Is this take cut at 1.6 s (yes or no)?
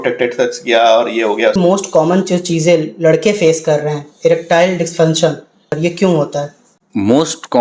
yes